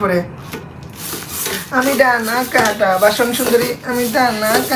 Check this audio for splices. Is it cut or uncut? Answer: uncut